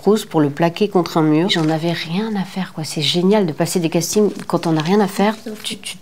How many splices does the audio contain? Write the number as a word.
one